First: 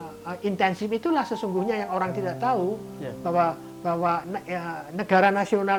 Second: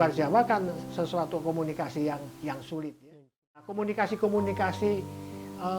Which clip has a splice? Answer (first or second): second